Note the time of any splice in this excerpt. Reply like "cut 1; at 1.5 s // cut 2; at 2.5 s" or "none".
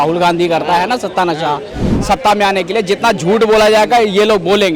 cut 1; at 1.9 s